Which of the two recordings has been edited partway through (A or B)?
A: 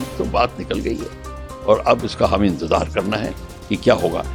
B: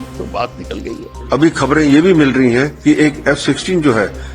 B